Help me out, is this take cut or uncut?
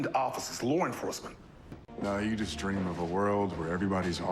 cut